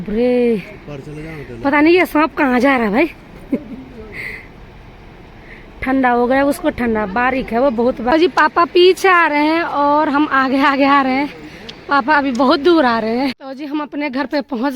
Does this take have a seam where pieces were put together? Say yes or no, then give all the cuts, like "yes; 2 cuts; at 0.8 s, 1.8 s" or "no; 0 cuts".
yes; 2 cuts; at 8.1 s, 13.5 s